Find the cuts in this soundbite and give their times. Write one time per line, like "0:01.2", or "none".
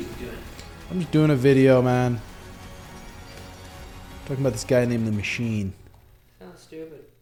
none